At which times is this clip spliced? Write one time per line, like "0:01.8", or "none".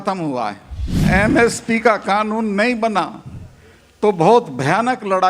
0:01.0